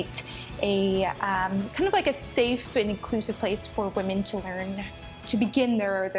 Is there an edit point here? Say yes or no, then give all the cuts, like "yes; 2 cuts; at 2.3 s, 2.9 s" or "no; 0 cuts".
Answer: no; 0 cuts